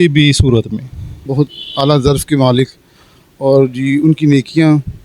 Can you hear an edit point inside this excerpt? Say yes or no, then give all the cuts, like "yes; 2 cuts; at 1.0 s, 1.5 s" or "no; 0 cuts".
yes; 1 cut; at 1.3 s